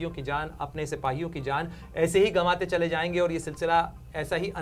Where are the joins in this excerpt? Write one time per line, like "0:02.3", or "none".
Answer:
none